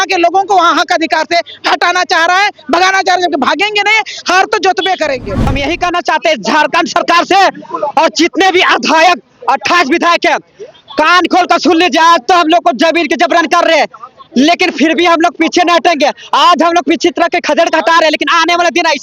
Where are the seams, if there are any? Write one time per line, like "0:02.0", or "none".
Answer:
0:05.4